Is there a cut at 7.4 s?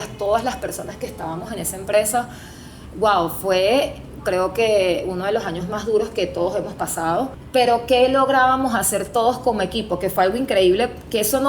yes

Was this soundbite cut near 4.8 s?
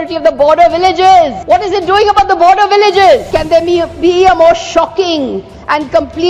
no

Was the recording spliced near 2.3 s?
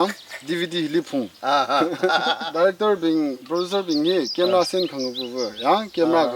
yes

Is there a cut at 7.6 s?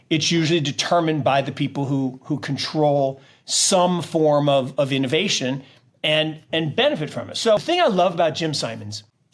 yes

